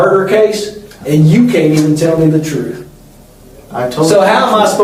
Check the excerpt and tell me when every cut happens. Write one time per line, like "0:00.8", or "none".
none